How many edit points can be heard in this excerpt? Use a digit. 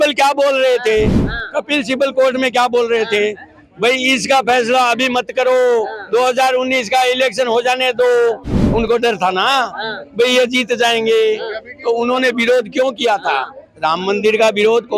0